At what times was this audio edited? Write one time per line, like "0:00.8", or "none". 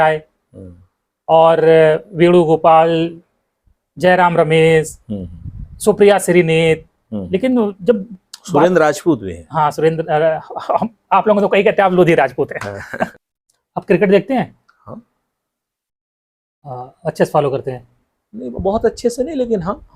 0:13.1